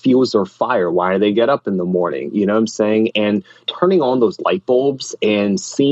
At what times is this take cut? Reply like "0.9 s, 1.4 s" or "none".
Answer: 3.6 s